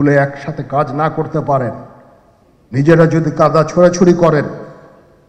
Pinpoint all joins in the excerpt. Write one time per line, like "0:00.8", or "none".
none